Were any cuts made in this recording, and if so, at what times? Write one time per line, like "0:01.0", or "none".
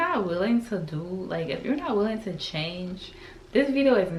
none